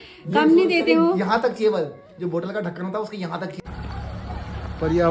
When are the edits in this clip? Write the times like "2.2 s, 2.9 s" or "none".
3.6 s